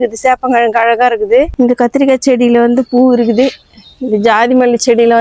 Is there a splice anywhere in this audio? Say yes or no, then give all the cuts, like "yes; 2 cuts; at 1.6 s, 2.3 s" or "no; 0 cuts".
yes; 1 cut; at 1.5 s